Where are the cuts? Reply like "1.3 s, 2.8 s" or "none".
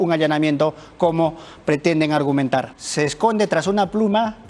2.7 s